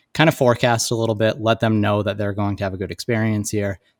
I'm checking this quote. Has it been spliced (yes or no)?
no